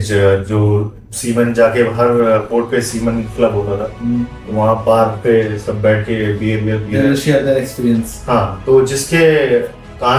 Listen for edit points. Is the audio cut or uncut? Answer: uncut